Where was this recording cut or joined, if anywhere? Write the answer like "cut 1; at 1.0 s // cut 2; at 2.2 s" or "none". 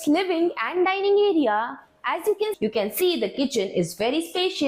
cut 1; at 2.5 s

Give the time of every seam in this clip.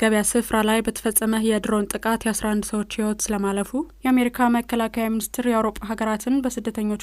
cut 1; at 3.9 s

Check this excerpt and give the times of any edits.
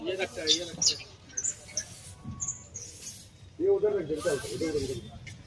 none

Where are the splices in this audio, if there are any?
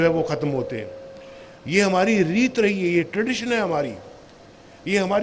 none

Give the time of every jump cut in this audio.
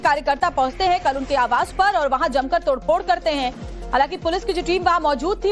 cut 1; at 3.4 s

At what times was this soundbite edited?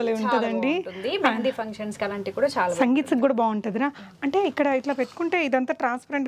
none

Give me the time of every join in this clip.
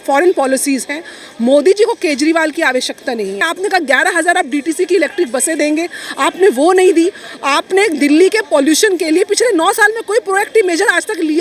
cut 1; at 3.5 s

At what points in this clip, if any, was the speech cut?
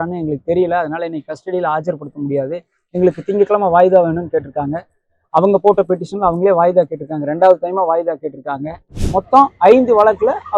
cut 1; at 9.0 s

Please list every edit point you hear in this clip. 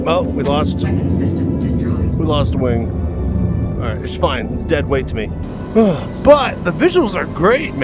cut 1; at 5.5 s

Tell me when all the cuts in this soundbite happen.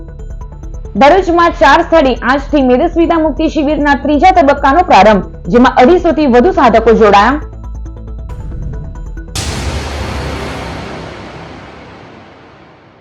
cut 1; at 9.2 s

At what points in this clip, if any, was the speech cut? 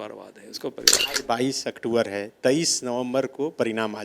cut 1; at 1.0 s

